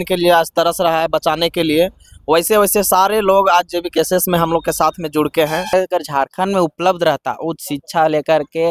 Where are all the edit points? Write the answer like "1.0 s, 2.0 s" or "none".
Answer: 5.7 s